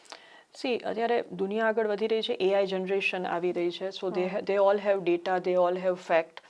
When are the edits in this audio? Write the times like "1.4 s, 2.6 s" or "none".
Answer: none